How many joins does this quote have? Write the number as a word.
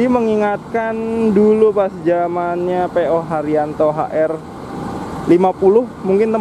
zero